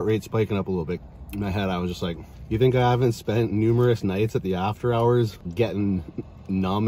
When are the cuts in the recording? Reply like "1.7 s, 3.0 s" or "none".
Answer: 1.0 s, 2.3 s, 5.4 s

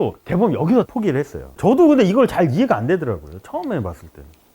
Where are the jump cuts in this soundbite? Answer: 1.5 s

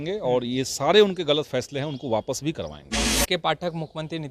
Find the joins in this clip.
3.1 s

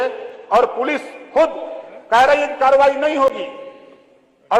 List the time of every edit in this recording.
none

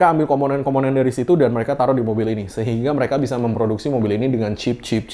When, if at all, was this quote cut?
none

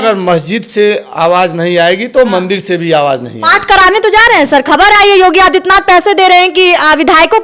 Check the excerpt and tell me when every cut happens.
none

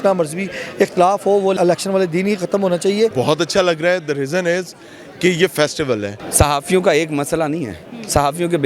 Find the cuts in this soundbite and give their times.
1.5 s, 3.1 s, 6.2 s

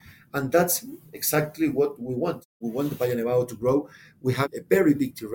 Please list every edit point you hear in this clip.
2.5 s, 4.4 s

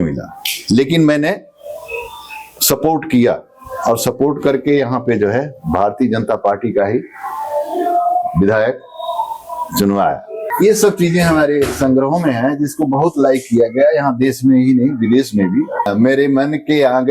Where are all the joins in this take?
10.5 s, 15.9 s

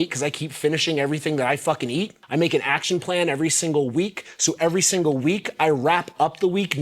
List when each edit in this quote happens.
2.2 s

